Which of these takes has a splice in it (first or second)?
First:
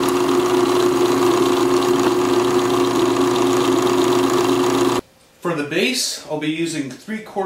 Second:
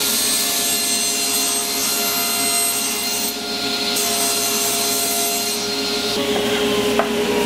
first